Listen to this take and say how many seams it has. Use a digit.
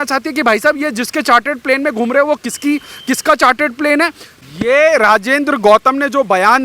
1